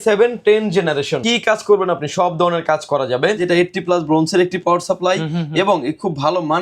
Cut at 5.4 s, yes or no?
no